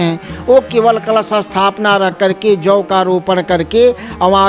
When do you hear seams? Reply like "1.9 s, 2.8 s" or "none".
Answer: none